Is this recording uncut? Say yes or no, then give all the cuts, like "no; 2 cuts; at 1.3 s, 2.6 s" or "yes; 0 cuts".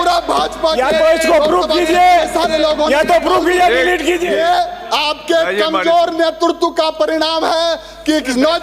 no; 1 cut; at 4.3 s